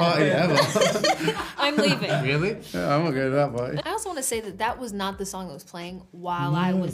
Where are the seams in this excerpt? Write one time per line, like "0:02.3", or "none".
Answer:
0:03.8